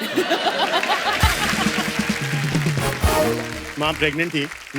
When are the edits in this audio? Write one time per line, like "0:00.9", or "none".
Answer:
0:03.6